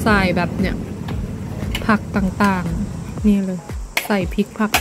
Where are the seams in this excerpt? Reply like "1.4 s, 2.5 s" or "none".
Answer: 3.1 s